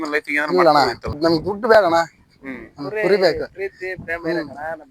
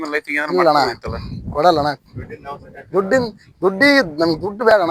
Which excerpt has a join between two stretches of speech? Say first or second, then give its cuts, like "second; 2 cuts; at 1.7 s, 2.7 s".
first; 1 cut; at 1.1 s